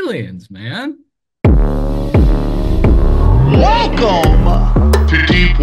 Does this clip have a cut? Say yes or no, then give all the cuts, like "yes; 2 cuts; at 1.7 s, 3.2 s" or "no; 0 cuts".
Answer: yes; 1 cut; at 1.3 s